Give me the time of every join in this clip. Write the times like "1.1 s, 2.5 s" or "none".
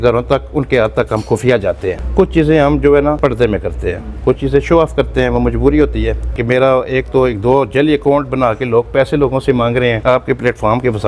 2.0 s, 3.2 s, 6.4 s, 10.0 s